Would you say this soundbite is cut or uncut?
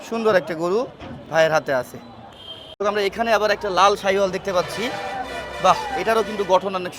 uncut